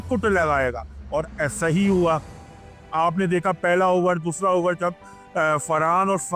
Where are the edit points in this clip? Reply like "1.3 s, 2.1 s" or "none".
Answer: none